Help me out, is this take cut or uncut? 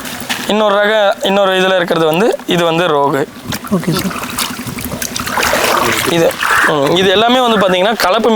uncut